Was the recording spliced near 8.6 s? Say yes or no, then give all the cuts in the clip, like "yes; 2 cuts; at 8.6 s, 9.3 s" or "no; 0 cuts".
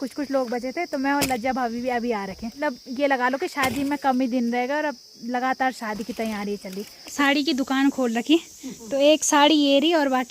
no; 2 cuts; at 2.6 s, 7.1 s